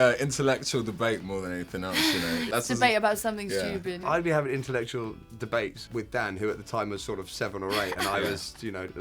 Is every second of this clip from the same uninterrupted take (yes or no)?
no